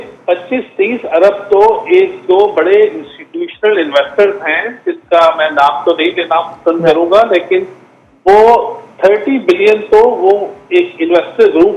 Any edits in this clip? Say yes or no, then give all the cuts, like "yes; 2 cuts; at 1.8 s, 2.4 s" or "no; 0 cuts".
no; 0 cuts